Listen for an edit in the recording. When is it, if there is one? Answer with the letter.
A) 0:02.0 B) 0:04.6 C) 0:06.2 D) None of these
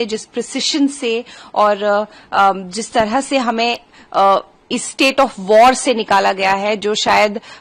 D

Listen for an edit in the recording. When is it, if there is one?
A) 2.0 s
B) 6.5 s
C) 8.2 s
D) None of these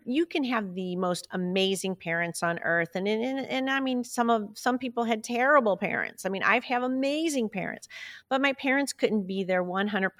D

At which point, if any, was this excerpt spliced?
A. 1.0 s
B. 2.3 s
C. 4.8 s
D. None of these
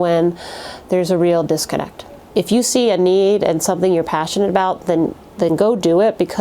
B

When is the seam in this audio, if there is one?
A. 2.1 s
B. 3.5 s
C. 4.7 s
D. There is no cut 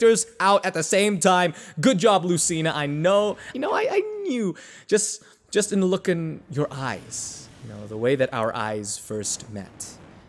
B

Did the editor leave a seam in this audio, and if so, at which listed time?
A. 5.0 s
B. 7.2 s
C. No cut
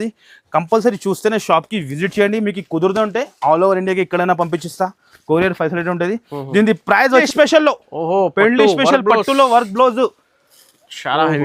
B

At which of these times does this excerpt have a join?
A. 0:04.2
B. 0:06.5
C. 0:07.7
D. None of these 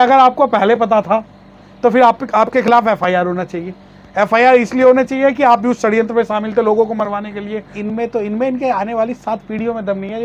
C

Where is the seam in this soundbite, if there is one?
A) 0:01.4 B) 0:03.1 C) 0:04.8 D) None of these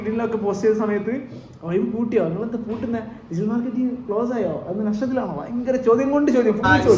D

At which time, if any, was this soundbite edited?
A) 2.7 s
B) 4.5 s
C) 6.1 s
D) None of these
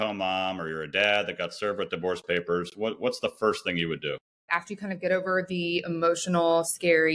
B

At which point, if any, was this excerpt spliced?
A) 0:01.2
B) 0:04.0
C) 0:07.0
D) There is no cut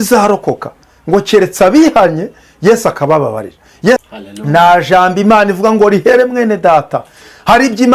B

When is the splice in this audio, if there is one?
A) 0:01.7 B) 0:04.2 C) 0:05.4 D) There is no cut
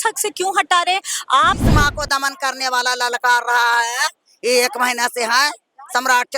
A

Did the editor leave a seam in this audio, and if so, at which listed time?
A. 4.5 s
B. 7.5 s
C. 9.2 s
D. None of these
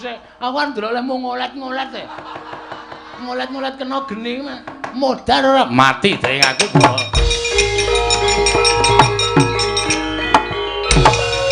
D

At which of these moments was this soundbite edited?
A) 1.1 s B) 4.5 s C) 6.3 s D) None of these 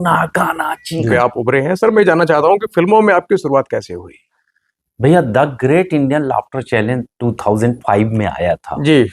A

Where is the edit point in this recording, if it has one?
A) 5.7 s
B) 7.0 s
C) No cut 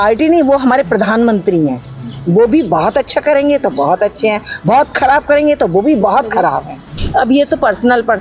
B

